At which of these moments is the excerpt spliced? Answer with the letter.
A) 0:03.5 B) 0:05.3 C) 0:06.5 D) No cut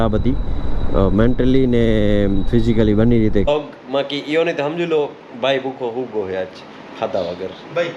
A